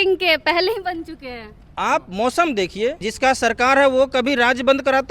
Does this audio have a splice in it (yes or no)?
yes